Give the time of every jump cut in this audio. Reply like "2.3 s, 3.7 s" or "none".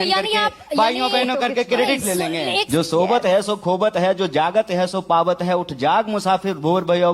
2.6 s